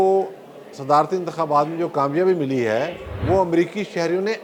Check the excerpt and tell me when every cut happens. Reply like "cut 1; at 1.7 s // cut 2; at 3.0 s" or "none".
none